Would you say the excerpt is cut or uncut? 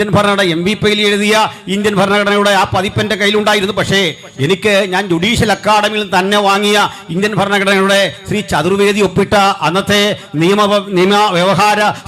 uncut